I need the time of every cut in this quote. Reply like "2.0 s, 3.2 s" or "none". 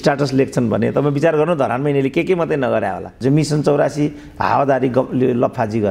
3.1 s